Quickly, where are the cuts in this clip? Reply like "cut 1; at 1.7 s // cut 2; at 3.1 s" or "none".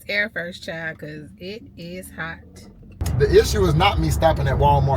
cut 1; at 3.0 s